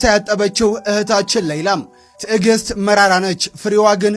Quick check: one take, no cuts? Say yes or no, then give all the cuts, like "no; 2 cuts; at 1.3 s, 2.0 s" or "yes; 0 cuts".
yes; 0 cuts